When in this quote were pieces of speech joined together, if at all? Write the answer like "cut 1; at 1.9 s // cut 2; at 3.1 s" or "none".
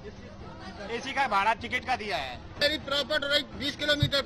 cut 1; at 2.6 s